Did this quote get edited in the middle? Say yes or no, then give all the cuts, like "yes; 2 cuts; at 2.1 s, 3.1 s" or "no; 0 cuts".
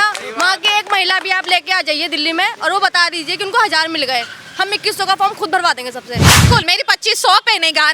yes; 1 cut; at 6.4 s